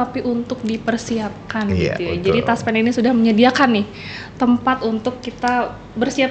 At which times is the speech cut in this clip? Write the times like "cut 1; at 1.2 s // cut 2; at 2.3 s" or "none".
none